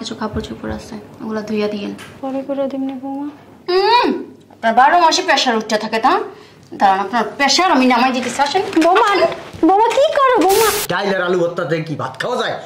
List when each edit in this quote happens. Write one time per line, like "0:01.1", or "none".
0:02.1
0:10.9